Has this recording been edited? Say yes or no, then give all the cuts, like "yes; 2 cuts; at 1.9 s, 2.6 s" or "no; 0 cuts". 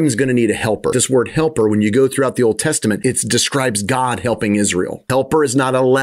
yes; 3 cuts; at 0.9 s, 3.0 s, 5.0 s